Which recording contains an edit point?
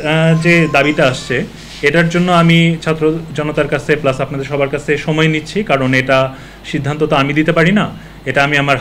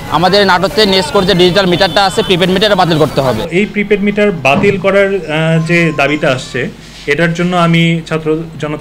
second; 1 cut; at 3.5 s

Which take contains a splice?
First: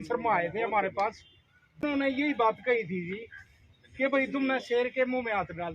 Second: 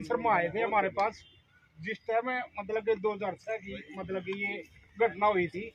first; 1 cut; at 1.8 s

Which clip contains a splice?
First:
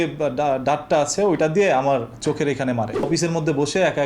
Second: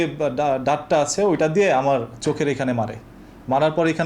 first; 1 cut; at 3.1 s

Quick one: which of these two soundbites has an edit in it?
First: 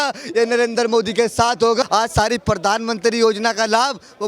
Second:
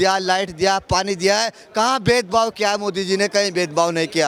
first; 1 cut; at 1.8 s

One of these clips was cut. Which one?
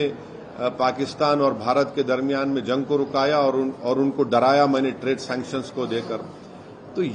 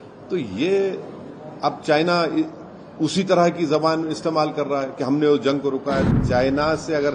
second; 1 cut; at 6.1 s

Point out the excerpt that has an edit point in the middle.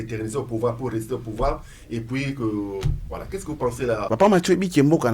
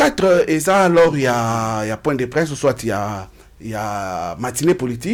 first; 1 cut; at 4.1 s

